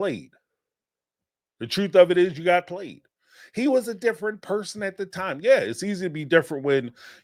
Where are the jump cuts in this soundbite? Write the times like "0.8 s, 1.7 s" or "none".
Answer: none